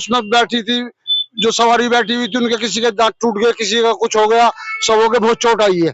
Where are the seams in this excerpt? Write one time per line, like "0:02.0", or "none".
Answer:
none